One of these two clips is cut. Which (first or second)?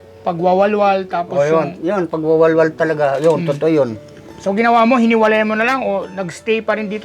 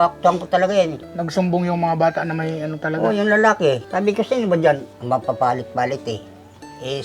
second